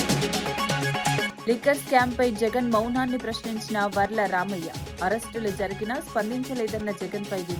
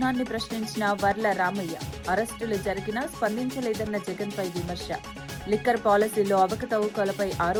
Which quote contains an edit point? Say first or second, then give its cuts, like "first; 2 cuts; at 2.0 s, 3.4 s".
first; 1 cut; at 1.2 s